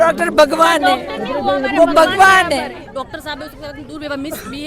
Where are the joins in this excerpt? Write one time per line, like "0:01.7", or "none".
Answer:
none